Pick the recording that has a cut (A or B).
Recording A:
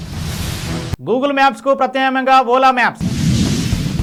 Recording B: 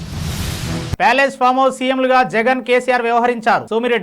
B